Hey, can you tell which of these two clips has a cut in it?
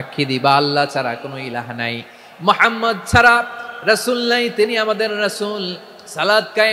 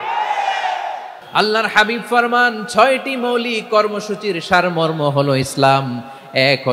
second; 1 cut; at 1.1 s

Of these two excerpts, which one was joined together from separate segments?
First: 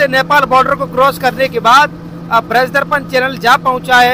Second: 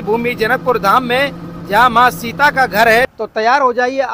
second; 1 cut; at 3.0 s

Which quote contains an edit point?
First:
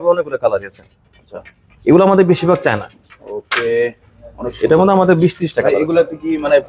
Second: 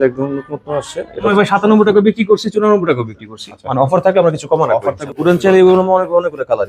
second; 2 cuts; at 1.3 s, 5.0 s

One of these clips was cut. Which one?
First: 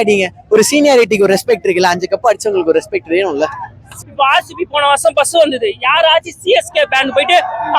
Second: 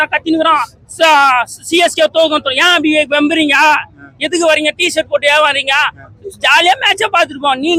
first; 1 cut; at 3.9 s

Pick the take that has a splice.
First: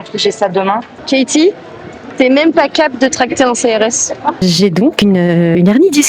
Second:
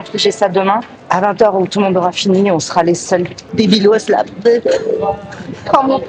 first; 2 cuts; at 0.9 s, 4.4 s

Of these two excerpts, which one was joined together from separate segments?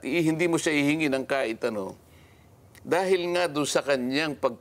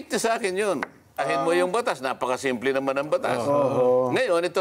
second; 1 cut; at 1.2 s

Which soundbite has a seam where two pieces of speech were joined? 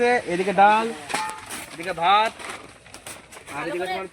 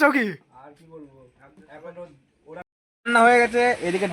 second; 1 cut; at 2.6 s

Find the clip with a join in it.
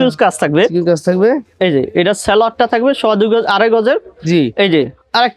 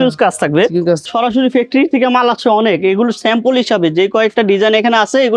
second; 1 cut; at 1.0 s

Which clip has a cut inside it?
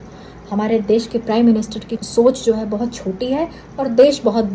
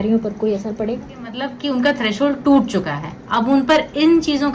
second; 1 cut; at 1.5 s

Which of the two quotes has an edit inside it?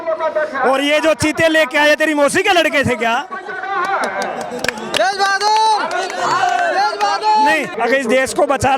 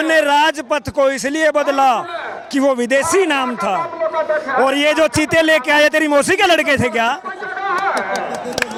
first; 1 cut; at 7.7 s

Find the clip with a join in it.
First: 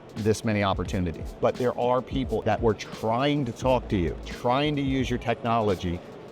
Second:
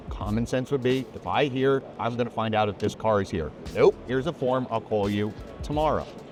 first; 3 cuts; at 1.2 s, 2.4 s, 4.3 s

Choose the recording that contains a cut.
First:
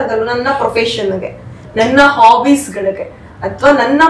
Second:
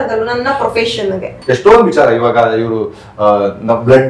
second; 1 cut; at 1.3 s

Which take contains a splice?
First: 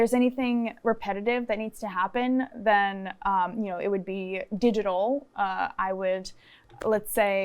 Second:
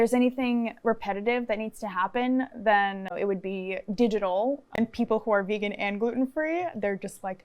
second; 2 cuts; at 3.1 s, 4.8 s

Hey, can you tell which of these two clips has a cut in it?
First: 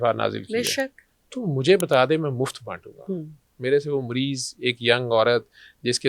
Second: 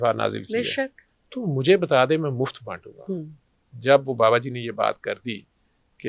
second; 1 cut; at 3.4 s

